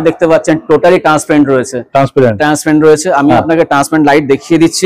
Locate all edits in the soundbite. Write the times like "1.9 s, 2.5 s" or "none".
none